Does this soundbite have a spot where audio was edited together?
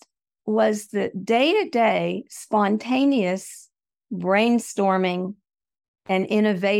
no; 0 cuts

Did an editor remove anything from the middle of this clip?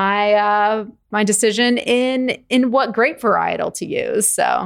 yes; 1 cut; at 1.1 s

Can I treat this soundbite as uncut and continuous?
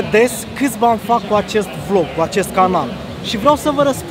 yes; 0 cuts

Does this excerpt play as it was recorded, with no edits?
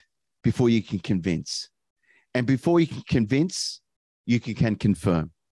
yes; 0 cuts

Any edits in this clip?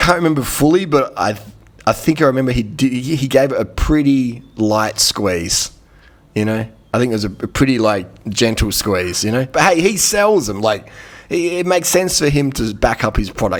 no; 0 cuts

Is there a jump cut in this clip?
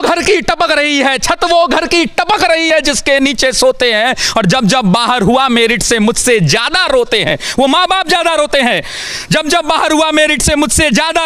no; 0 cuts

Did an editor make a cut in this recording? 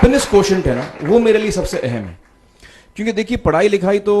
no; 0 cuts

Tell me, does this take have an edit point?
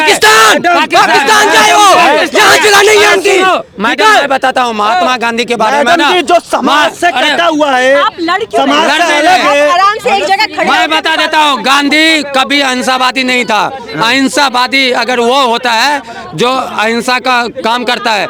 no; 0 cuts

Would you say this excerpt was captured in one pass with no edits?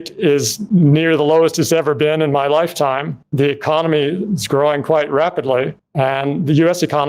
yes; 0 cuts

